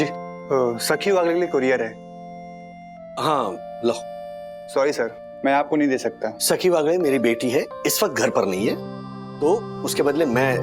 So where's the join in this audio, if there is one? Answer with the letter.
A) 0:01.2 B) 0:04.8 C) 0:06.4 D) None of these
C